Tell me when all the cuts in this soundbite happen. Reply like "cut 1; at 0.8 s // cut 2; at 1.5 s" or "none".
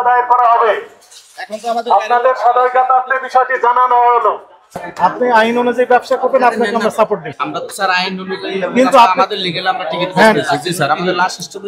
cut 1; at 7.3 s